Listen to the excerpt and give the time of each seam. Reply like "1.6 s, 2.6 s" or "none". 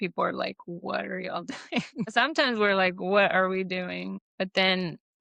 2.1 s, 4.2 s